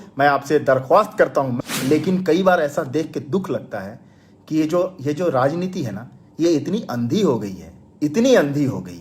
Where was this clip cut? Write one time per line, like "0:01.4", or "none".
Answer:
0:01.5